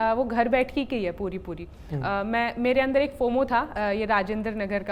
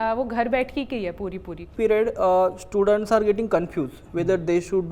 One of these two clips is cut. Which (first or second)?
second